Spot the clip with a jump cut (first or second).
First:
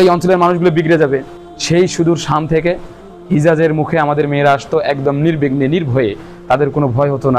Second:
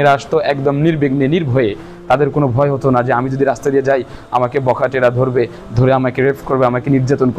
first